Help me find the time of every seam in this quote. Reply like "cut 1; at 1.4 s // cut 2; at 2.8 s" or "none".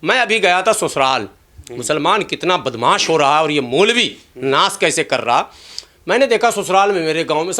none